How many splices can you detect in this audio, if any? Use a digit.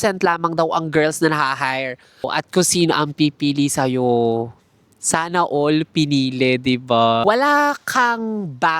2